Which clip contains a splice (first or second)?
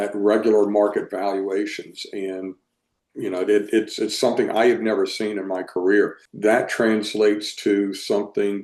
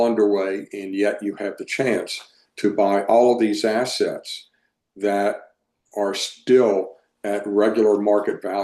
first